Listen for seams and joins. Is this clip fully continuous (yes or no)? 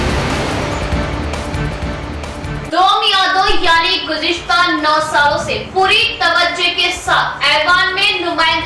yes